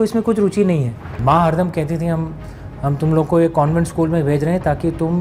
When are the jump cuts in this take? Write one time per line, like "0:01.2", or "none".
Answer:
0:01.1